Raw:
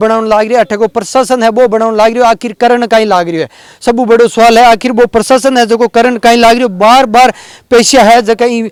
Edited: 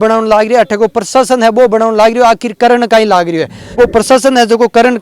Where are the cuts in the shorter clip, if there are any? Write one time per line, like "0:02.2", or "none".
0:03.7